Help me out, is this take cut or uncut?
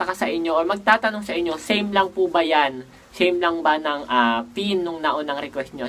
uncut